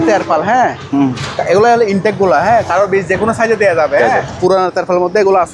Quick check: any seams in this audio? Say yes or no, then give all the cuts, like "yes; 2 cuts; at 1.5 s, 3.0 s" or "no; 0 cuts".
yes; 2 cuts; at 2.9 s, 4.4 s